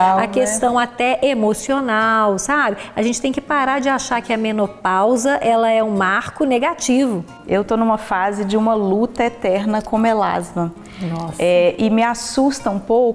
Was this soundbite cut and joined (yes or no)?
yes